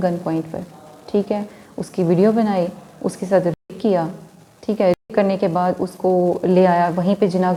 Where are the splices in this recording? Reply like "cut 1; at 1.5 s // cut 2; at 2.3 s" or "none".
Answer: none